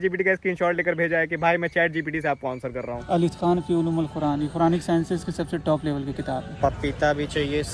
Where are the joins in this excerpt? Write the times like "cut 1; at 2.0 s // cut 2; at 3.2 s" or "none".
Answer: cut 1; at 3.0 s // cut 2; at 6.5 s